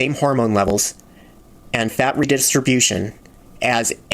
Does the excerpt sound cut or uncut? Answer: uncut